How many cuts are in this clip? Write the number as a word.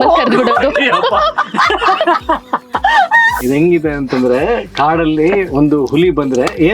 one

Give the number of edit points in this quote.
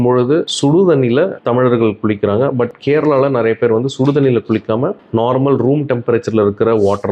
zero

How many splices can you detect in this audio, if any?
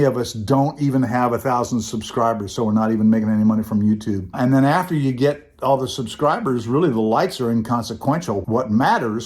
one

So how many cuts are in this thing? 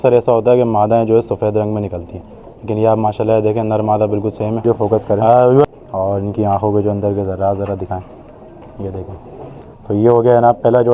two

